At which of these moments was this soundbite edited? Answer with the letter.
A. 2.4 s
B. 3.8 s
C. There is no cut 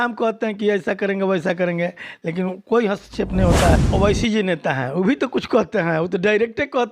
B